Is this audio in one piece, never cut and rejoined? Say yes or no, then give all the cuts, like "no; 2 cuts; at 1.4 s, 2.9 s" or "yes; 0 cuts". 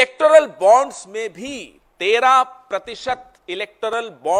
yes; 0 cuts